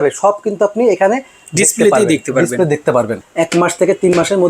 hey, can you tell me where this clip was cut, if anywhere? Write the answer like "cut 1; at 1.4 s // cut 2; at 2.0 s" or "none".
cut 1; at 3.1 s